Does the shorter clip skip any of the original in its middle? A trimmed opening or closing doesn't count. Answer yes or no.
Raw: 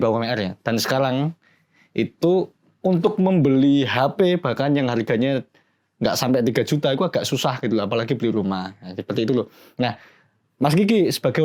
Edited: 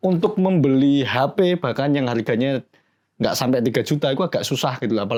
no